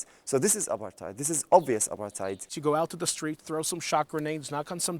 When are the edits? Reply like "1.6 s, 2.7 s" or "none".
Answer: 2.5 s